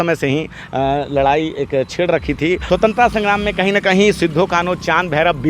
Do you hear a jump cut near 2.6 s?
yes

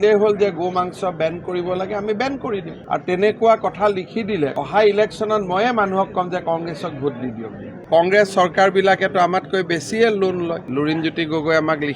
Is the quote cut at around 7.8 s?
yes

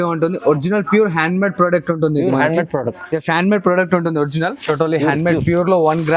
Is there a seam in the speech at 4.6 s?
yes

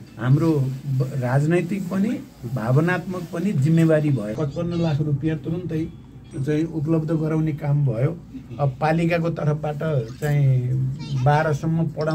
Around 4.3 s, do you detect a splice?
yes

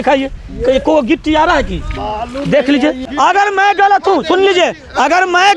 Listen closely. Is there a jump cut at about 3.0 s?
yes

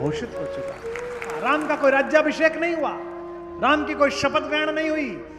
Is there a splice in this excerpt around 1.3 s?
yes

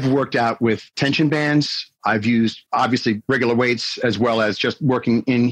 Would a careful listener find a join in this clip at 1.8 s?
no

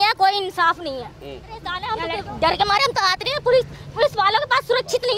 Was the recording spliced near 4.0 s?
no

